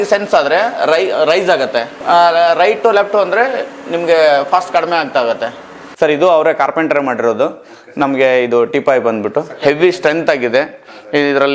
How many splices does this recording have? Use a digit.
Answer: 2